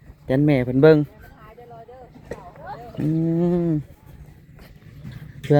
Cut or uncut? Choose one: uncut